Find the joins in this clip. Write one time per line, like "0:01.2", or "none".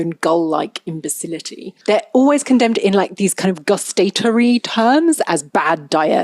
0:01.7

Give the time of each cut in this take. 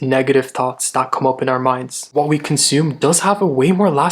0:02.1

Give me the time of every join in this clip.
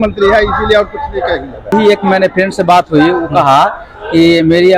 0:01.7

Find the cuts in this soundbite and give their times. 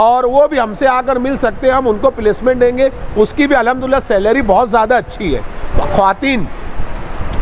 0:05.7

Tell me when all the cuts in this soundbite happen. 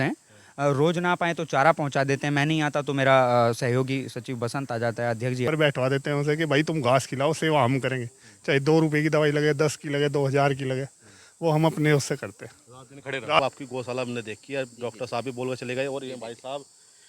0:05.5
0:13.4

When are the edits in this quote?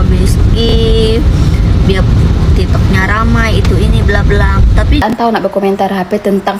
0:05.0

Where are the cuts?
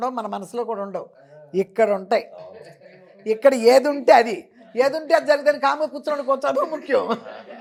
none

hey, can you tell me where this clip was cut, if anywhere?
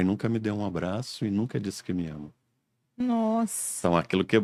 none

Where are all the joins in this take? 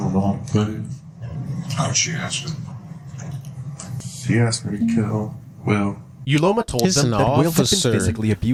none

